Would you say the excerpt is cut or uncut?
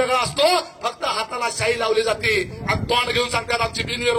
uncut